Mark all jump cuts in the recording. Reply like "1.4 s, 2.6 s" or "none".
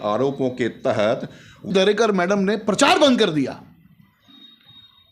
1.7 s

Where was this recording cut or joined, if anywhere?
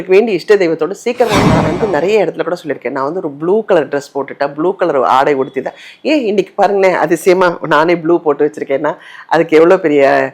1.6 s

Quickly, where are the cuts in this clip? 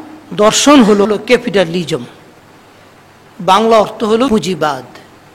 1.1 s, 4.3 s

